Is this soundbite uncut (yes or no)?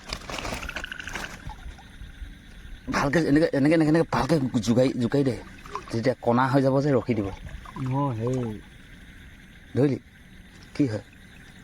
no